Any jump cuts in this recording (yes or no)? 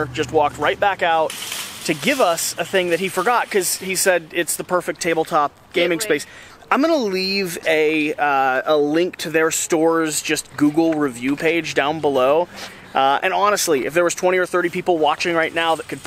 no